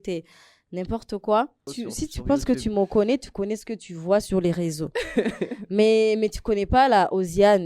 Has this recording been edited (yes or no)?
yes